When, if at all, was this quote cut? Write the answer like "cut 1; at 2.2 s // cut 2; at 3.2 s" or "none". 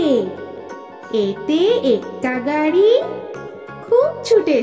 none